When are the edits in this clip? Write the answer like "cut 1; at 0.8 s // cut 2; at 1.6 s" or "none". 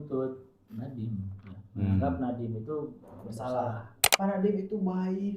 cut 1; at 4.0 s

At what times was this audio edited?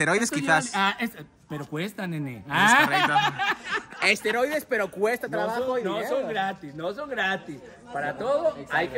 none

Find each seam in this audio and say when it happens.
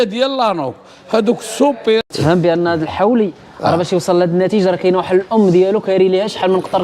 cut 1; at 2.0 s

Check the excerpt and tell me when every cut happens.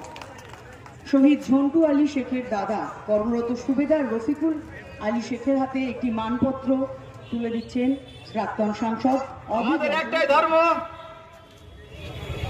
cut 1; at 9.8 s

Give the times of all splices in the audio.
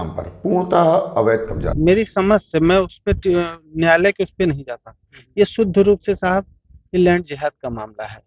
cut 1; at 1.7 s

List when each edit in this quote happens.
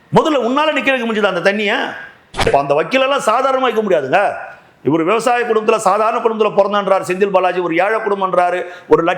cut 1; at 2.5 s

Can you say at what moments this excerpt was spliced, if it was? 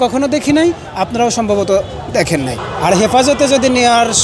cut 1; at 2.6 s

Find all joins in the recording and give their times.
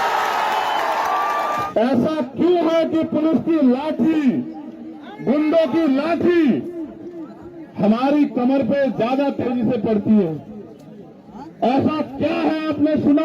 cut 1; at 1.7 s

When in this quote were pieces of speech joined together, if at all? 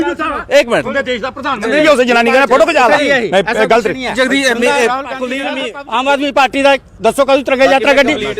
cut 1; at 5.7 s

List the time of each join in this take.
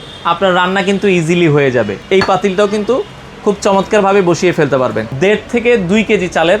cut 1; at 2.0 s // cut 2; at 5.1 s

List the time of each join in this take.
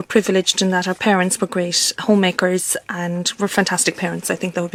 none

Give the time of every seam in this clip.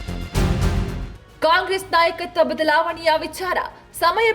cut 1; at 1.3 s

